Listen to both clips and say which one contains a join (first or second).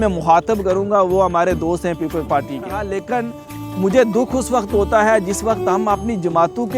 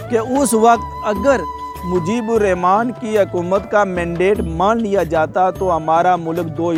first